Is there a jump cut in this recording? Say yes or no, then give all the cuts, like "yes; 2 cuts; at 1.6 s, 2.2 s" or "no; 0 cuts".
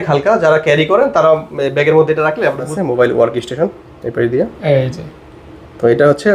yes; 1 cut; at 2.7 s